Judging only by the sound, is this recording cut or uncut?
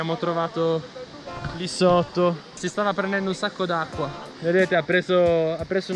cut